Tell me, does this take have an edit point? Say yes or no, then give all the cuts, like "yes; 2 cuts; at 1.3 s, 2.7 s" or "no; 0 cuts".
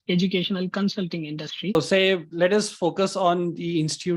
yes; 1 cut; at 1.8 s